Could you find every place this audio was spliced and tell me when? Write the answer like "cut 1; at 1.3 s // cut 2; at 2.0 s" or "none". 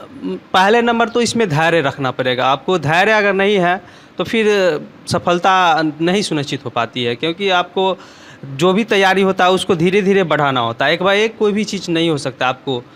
none